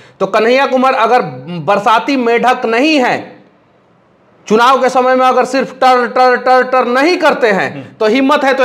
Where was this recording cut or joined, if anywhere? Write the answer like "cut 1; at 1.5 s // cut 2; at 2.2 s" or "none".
none